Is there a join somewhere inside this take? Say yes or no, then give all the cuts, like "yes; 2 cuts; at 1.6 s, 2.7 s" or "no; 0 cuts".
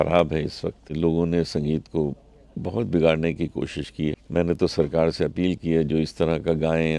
yes; 2 cuts; at 0.9 s, 4.2 s